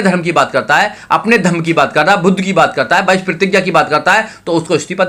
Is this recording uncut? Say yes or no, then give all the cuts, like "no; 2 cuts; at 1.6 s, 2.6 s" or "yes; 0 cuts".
yes; 0 cuts